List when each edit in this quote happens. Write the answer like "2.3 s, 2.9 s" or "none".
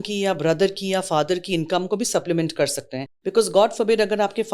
3.1 s